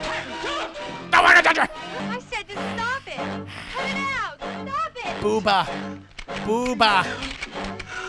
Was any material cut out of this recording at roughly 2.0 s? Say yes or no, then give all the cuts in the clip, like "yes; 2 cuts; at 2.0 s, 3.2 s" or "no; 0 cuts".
yes; 1 cut; at 2.0 s